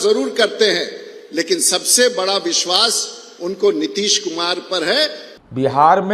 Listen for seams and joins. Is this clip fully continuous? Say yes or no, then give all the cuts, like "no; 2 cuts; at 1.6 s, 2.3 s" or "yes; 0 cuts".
no; 1 cut; at 5.2 s